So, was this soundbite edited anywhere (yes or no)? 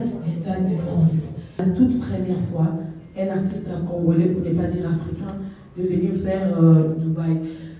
yes